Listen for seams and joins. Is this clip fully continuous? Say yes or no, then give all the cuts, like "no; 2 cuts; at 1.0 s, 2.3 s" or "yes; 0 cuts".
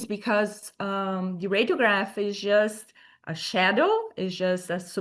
yes; 0 cuts